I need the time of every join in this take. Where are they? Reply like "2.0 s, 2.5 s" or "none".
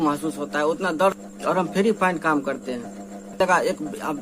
1.2 s, 3.4 s